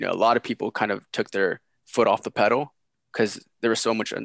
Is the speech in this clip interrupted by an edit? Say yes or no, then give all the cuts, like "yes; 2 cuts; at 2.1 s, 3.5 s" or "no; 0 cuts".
no; 0 cuts